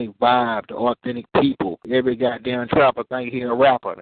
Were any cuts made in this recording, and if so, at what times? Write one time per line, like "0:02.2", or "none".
0:01.8